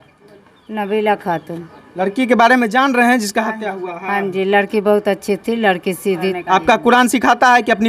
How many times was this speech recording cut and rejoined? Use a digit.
1